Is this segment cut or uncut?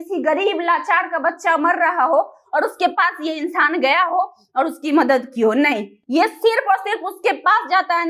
uncut